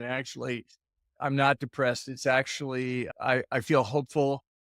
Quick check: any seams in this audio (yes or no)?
yes